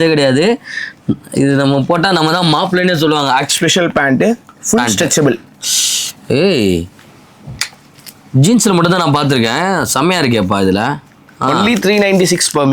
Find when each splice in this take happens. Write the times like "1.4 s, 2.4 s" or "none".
3.5 s